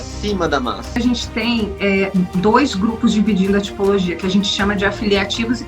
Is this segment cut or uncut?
cut